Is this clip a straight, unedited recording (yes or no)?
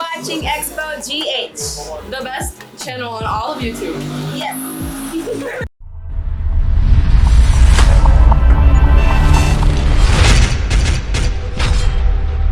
yes